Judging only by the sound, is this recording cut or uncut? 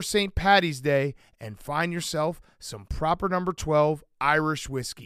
uncut